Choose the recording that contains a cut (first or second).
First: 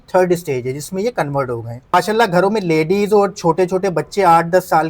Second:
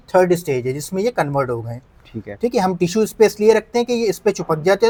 first